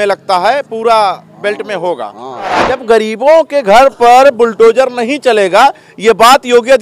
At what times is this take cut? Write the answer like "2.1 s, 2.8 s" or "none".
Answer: 2.6 s